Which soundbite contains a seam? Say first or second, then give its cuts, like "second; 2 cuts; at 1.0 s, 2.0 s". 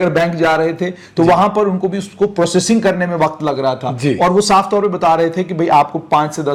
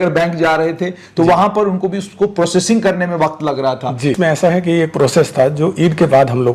second; 1 cut; at 4.2 s